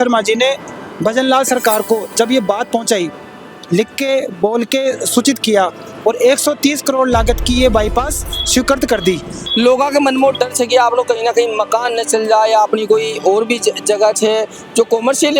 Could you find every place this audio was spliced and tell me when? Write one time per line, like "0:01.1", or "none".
0:05.9
0:09.5

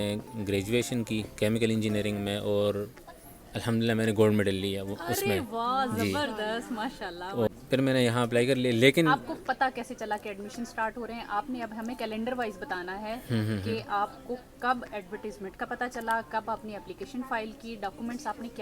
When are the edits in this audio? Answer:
0:07.5

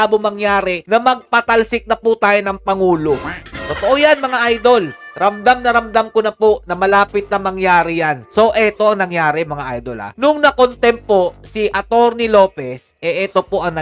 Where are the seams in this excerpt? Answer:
none

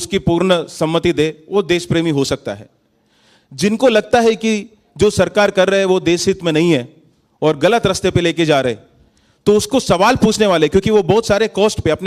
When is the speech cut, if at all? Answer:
none

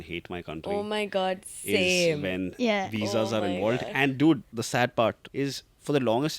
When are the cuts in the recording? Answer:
0:04.5
0:05.2

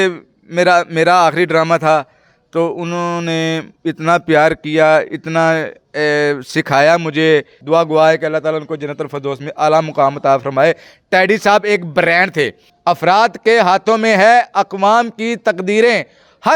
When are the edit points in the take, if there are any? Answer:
0:07.6
0:12.6

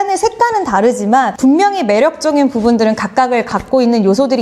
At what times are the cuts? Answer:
0:01.3

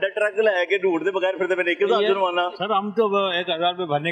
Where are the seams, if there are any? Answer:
0:02.6

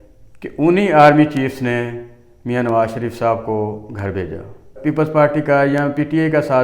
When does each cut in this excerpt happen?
0:04.7

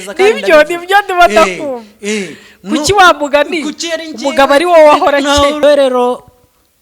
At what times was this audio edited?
0:05.6

